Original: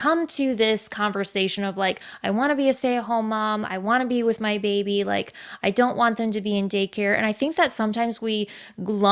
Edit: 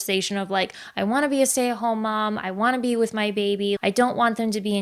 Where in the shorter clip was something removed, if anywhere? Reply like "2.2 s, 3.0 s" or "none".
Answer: 3.8 s